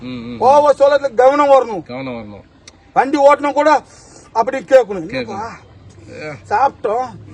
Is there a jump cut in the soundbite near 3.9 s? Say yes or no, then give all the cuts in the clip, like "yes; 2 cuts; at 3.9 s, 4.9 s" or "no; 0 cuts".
no; 0 cuts